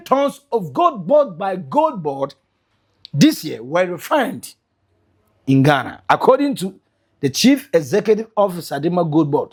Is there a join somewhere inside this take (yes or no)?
no